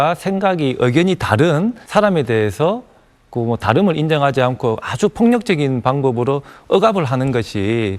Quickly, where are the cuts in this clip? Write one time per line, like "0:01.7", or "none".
none